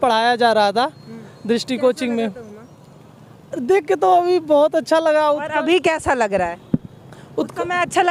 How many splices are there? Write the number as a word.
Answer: zero